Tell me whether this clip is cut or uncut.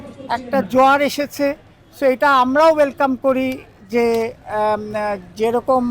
uncut